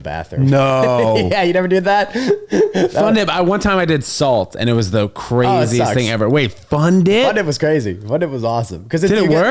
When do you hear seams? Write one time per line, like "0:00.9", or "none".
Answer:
none